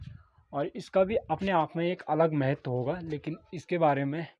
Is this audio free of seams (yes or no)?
yes